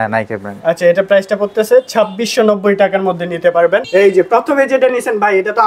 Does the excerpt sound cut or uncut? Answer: cut